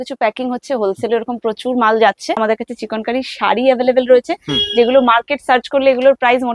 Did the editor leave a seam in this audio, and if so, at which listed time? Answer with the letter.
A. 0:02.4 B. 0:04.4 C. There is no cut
A